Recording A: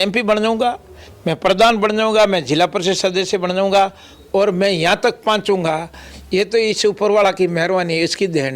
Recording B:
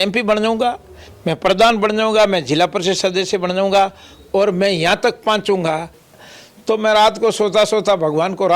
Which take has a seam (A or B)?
B